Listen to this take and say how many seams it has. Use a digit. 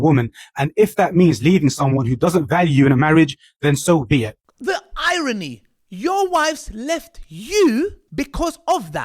1